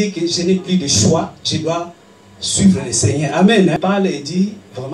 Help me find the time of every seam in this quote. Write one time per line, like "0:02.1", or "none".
0:03.8